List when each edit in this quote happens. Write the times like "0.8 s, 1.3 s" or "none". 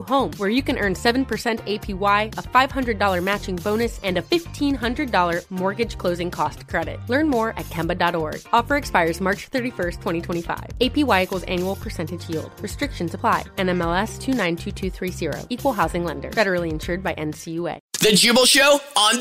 18.0 s